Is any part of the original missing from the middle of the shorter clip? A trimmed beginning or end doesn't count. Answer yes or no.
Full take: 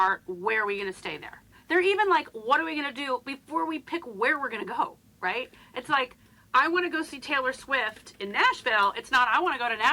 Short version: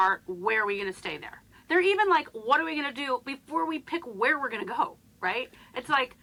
no